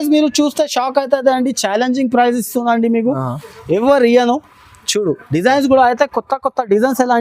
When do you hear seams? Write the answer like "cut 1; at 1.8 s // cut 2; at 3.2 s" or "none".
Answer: none